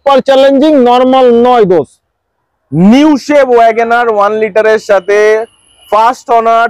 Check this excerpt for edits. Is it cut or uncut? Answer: uncut